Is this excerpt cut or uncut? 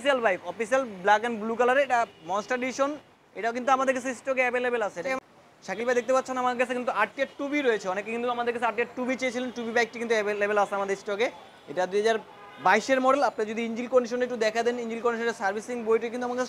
cut